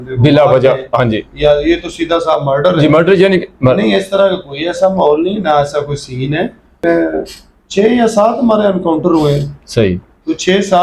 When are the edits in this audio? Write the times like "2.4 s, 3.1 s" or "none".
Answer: 6.8 s